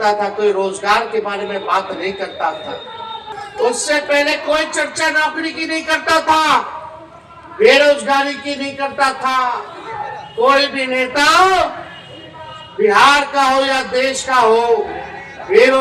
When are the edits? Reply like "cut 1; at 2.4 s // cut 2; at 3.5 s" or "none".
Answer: cut 1; at 3.4 s